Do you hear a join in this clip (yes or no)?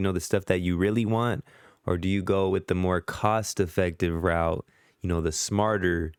no